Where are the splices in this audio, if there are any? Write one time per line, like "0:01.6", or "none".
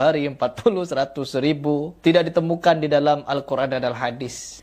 0:01.9